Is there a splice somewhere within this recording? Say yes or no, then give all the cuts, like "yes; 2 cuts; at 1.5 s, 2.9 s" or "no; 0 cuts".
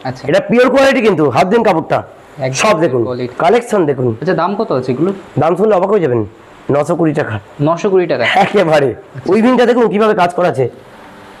yes; 2 cuts; at 3.3 s, 9.1 s